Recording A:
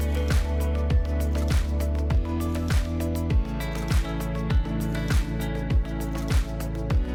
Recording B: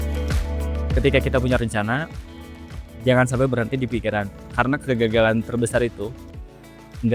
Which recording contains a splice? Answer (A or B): B